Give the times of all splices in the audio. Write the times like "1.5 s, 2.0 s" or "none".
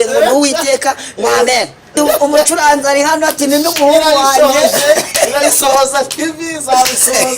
1.9 s